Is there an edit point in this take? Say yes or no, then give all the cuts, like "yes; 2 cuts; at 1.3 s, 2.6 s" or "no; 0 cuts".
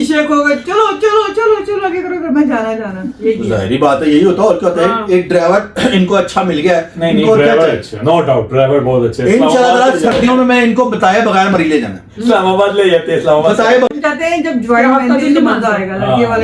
yes; 1 cut; at 13.9 s